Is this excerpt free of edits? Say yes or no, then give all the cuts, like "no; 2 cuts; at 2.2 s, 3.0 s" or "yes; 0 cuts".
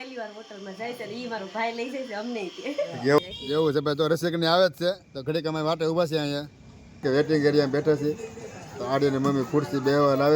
no; 2 cuts; at 3.2 s, 7.0 s